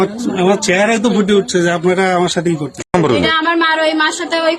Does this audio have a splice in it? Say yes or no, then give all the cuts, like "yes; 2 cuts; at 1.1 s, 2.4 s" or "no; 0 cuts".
yes; 1 cut; at 2.9 s